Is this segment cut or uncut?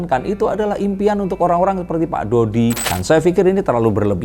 cut